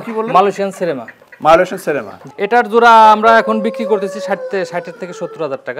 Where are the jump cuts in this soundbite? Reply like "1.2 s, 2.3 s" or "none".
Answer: 2.2 s